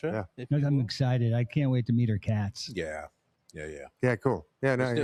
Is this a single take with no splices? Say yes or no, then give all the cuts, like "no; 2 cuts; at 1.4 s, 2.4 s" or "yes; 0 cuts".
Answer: yes; 0 cuts